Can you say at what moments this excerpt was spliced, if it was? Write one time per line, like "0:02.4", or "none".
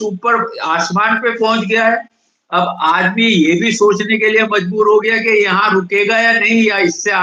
none